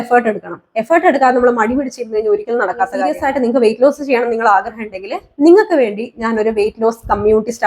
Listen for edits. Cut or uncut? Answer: cut